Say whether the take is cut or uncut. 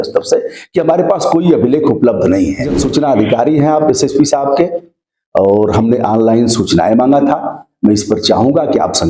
cut